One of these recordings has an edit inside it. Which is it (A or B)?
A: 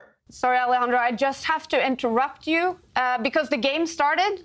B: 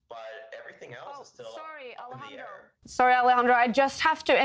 A